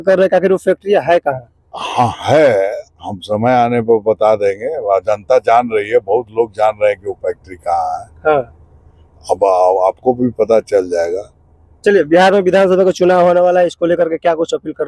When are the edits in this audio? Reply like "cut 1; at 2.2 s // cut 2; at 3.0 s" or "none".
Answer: none